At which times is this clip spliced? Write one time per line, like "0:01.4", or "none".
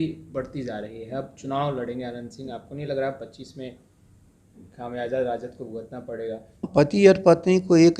0:06.7